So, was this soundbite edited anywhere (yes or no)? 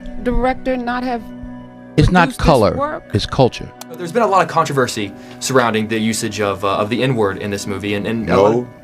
yes